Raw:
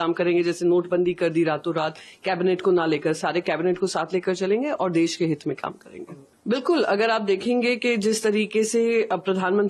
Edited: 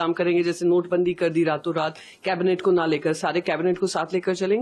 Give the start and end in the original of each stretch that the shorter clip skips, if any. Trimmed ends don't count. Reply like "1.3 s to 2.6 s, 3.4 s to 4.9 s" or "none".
none